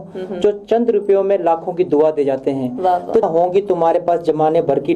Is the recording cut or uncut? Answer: cut